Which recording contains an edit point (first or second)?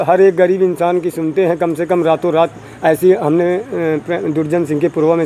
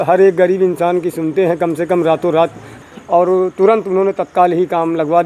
second